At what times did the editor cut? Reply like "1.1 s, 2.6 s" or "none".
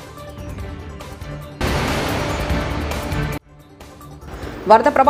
none